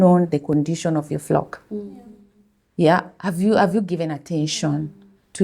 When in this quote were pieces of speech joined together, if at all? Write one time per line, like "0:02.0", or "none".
none

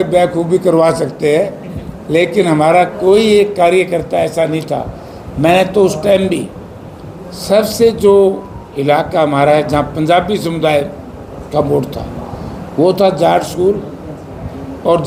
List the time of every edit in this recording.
none

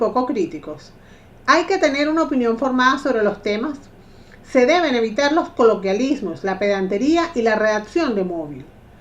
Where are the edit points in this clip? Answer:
0:03.7

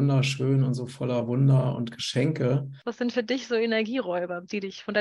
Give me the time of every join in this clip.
0:02.8

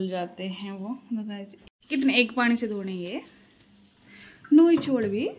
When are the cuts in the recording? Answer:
0:01.6

